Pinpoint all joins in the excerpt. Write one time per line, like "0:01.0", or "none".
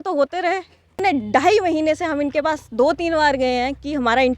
0:01.0